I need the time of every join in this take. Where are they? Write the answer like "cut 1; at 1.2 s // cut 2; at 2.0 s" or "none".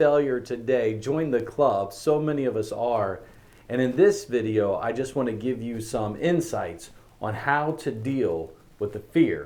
none